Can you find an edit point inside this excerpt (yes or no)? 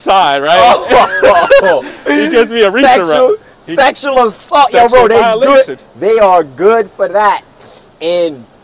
no